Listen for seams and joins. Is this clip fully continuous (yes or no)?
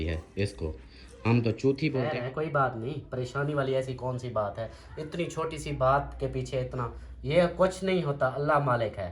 no